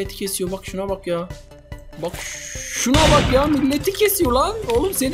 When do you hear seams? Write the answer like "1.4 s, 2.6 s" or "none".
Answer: none